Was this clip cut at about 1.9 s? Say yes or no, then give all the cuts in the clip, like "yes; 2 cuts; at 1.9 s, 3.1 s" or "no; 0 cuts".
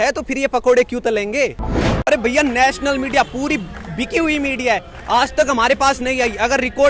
yes; 1 cut; at 1.9 s